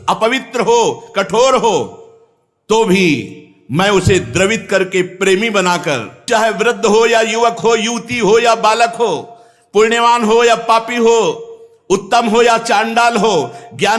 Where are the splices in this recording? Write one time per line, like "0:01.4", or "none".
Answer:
0:06.3